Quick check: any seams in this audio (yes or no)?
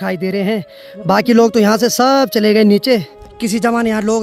yes